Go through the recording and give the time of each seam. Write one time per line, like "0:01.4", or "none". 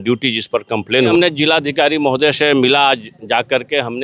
0:01.1